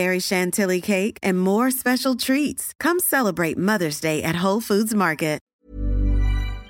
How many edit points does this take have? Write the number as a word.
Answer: one